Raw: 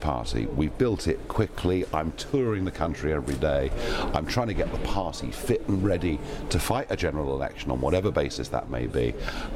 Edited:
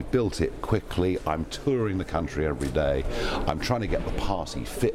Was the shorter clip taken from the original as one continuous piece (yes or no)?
yes